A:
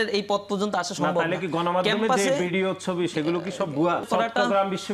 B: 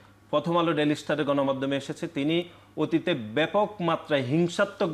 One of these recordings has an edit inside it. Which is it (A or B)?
A